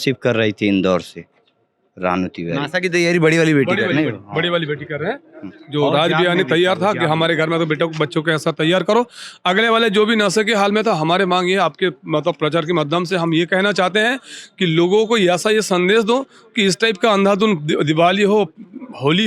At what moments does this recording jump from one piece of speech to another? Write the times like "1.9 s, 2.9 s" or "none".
none